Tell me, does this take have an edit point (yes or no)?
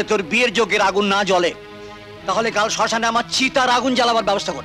no